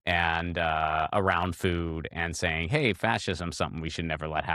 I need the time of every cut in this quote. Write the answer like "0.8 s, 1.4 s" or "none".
none